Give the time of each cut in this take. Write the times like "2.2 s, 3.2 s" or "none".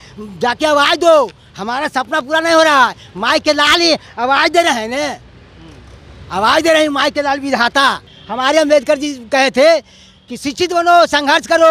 8.2 s